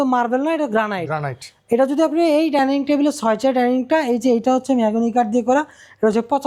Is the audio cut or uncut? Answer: uncut